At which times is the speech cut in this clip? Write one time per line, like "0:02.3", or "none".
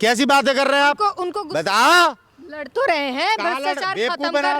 0:01.3